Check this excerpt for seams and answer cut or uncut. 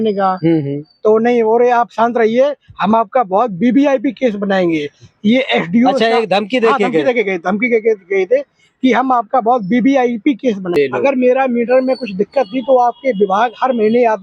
cut